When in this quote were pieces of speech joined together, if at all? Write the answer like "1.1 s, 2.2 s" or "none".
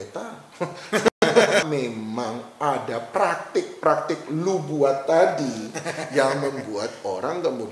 1.6 s

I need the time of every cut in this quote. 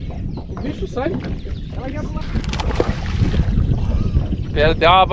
2.2 s

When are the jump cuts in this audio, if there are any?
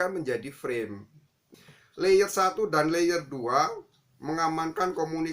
1.4 s

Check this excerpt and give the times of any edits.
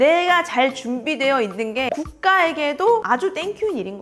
none

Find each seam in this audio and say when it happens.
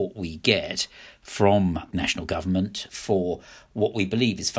1.9 s, 2.9 s

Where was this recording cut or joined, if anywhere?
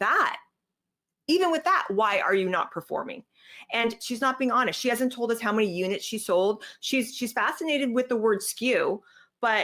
4.0 s

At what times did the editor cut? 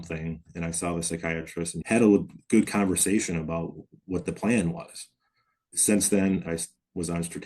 1.7 s, 6.5 s

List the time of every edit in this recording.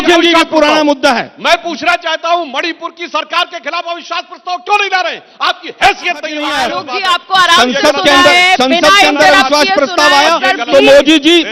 6.4 s

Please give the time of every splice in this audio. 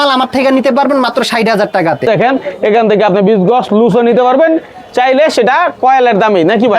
2.1 s

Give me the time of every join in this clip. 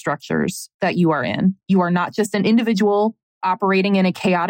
1.6 s, 3.2 s

